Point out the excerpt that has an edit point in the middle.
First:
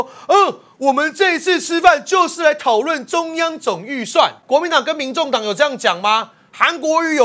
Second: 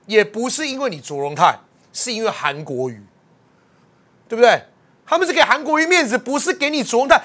first; 1 cut; at 4.4 s

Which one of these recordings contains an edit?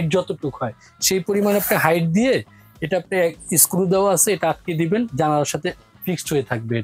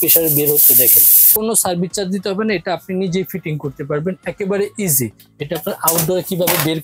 second; 2 cuts; at 1.3 s, 5.2 s

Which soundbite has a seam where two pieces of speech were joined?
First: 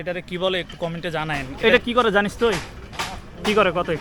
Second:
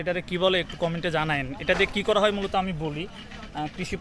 first; 1 cut; at 1.5 s

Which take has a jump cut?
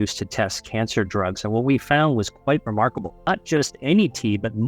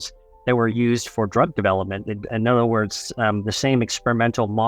first; 1 cut; at 3.3 s

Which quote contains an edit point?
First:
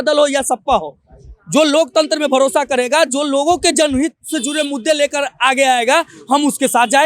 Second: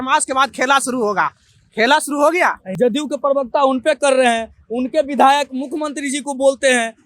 second; 1 cut; at 2.6 s

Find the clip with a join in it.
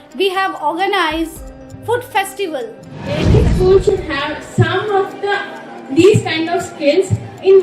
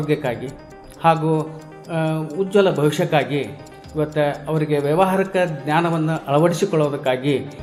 first; 1 cut; at 3.2 s

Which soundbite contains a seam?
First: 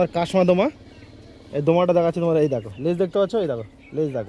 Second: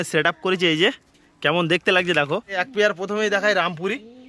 second; 1 cut; at 2.6 s

